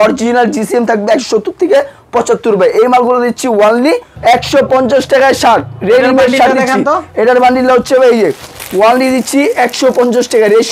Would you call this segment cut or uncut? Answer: cut